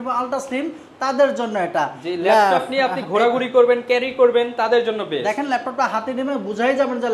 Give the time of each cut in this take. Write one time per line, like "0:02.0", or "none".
none